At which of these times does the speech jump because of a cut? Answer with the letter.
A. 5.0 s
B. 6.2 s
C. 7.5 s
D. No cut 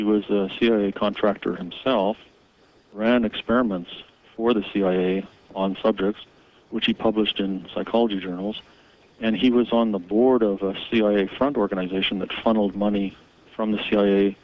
C